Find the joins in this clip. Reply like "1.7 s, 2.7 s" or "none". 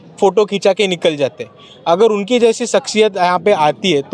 none